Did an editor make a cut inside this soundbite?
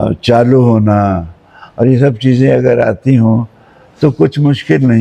no; 0 cuts

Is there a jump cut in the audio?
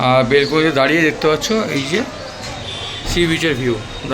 no; 0 cuts

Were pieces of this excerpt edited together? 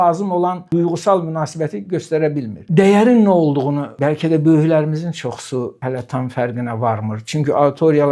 yes; 1 cut; at 2.6 s

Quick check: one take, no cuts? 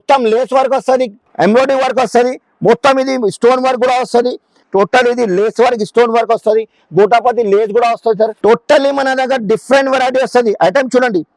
no; 3 cuts; at 1.2 s, 4.6 s, 8.3 s

